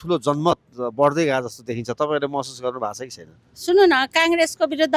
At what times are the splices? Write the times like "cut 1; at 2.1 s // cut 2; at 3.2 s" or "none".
none